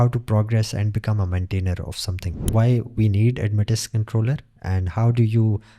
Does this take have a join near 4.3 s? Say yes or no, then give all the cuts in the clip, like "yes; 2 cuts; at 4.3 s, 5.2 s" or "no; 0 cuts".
no; 1 cut; at 2.4 s